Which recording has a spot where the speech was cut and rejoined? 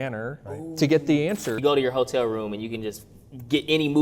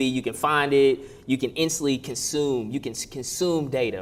first; 1 cut; at 1.6 s

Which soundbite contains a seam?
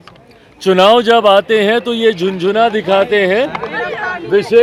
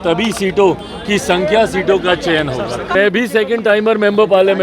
second; 1 cut; at 2.9 s

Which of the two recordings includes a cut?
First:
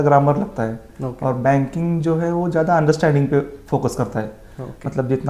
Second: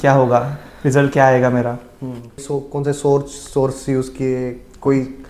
second; 1 cut; at 2.5 s

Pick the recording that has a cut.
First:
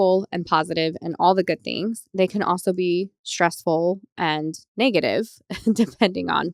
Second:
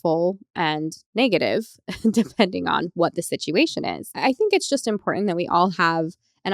second; 1 cut; at 4.1 s

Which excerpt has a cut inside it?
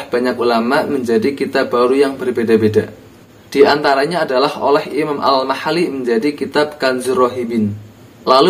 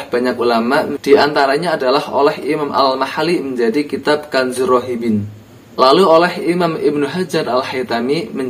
second; 1 cut; at 0.9 s

